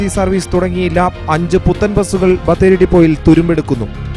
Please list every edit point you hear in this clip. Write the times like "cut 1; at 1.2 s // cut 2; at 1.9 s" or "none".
none